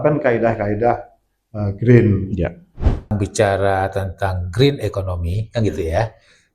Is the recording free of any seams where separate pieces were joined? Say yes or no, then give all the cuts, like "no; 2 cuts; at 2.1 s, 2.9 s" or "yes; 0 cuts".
no; 1 cut; at 3.1 s